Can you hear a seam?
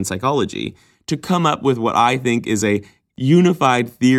yes; 1 cut; at 3.0 s

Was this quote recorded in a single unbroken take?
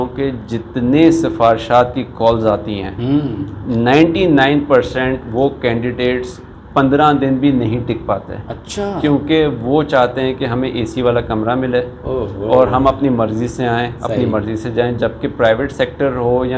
yes; 0 cuts

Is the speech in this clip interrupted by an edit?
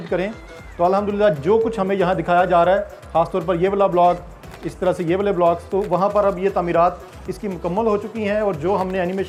no; 0 cuts

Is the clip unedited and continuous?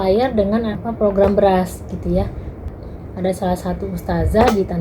no; 1 cut; at 2.7 s

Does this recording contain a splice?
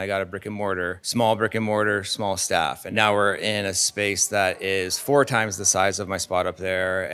yes; 2 cuts; at 1.0 s, 2.8 s

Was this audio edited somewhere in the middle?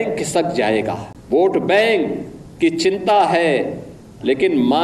yes; 1 cut; at 1.1 s

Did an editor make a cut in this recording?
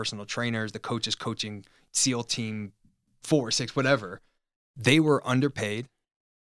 yes; 2 cuts; at 1.9 s, 3.1 s

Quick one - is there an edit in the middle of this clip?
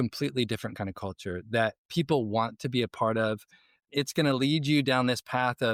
no; 0 cuts

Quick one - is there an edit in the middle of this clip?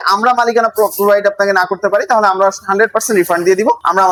no; 0 cuts

